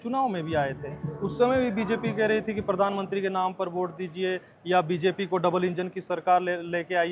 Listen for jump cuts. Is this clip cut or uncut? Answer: uncut